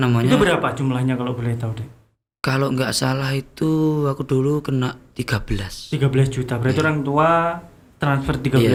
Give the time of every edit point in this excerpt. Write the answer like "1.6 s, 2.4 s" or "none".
none